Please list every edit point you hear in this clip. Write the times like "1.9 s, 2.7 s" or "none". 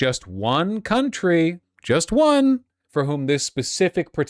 2.8 s